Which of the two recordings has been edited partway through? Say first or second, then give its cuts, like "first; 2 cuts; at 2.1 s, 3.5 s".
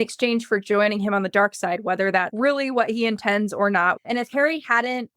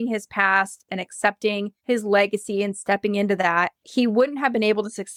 first; 1 cut; at 4.0 s